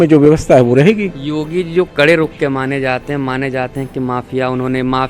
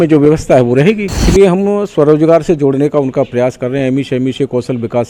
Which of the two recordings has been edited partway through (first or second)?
second